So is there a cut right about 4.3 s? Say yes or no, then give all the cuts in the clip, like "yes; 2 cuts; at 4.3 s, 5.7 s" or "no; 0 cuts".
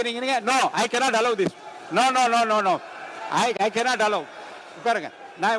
no; 0 cuts